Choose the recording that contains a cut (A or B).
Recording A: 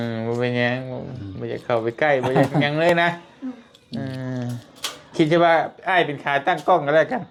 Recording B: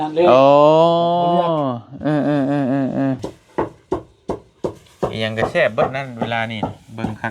B